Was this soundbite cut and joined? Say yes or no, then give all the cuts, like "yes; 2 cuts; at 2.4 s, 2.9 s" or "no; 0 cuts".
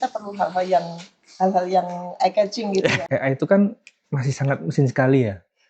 yes; 1 cut; at 3.1 s